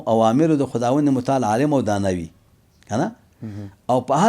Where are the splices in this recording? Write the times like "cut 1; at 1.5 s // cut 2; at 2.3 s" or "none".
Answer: none